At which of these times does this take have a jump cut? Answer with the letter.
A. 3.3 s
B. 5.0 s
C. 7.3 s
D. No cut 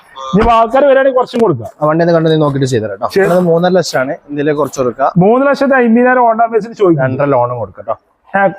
A